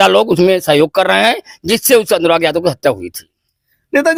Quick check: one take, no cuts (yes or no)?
yes